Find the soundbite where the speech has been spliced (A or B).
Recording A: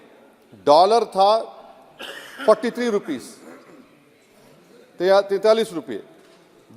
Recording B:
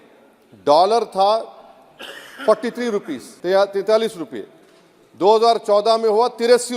B